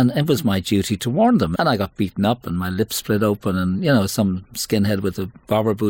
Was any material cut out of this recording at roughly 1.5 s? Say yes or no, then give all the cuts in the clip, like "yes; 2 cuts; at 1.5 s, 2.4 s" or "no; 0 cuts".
yes; 1 cut; at 1.5 s